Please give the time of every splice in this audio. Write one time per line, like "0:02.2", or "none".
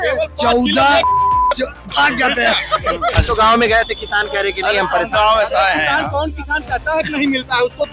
0:03.2